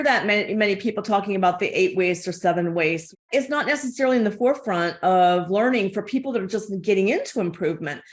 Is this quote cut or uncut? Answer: cut